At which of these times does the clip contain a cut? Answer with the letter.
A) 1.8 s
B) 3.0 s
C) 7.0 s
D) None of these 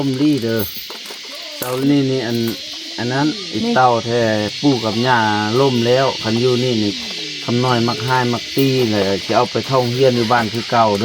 A